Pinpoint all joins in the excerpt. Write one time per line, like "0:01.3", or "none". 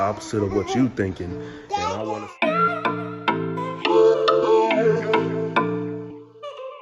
none